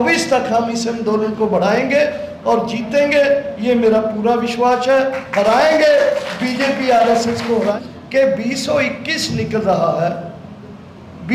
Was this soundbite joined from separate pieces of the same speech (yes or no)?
yes